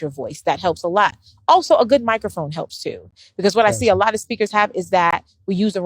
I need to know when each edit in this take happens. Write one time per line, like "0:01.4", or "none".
0:03.3